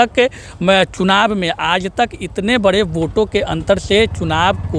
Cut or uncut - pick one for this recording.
uncut